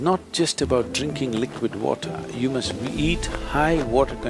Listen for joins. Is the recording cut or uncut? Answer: uncut